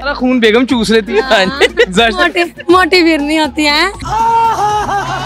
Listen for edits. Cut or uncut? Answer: cut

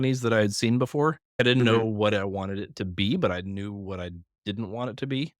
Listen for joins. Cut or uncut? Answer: cut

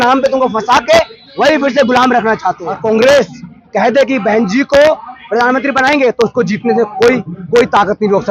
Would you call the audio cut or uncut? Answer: cut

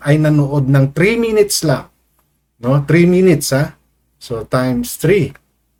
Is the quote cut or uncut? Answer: uncut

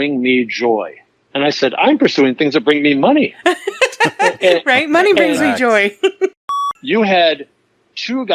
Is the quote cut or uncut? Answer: cut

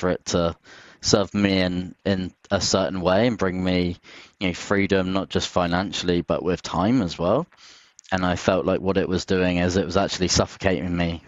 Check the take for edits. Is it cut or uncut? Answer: uncut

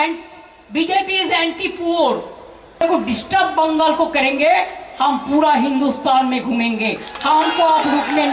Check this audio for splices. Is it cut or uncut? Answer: cut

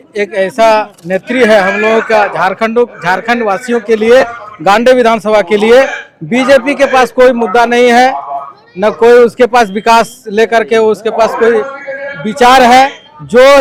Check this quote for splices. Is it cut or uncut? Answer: uncut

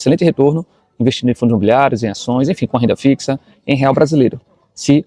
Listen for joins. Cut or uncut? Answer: uncut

